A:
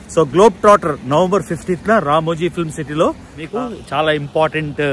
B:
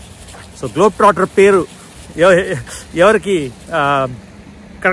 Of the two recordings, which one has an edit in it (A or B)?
A